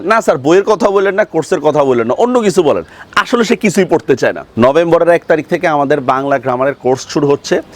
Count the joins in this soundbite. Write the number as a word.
one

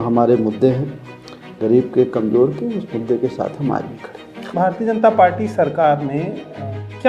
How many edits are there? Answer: one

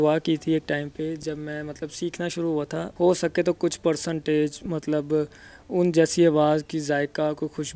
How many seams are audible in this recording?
one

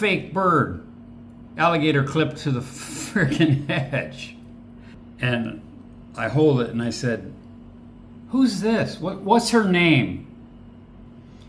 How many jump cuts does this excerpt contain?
one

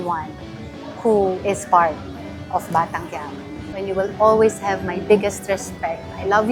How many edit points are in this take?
one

